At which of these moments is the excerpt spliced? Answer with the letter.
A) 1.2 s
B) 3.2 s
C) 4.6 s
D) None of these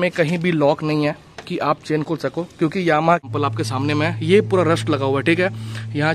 B